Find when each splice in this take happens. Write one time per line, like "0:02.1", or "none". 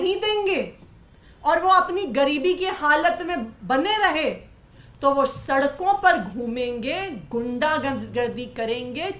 none